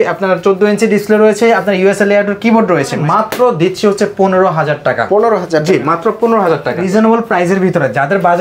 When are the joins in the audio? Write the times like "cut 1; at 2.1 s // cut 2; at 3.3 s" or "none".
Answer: cut 1; at 3.0 s // cut 2; at 6.8 s